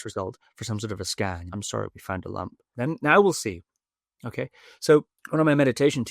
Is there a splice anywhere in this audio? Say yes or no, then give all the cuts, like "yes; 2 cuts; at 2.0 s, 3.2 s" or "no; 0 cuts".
yes; 3 cuts; at 1.4 s, 2.6 s, 5.2 s